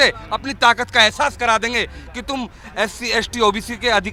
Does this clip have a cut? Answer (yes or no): no